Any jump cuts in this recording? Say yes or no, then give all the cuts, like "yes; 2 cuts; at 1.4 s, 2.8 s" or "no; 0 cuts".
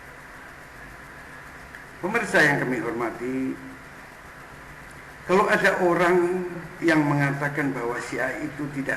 yes; 1 cut; at 1.5 s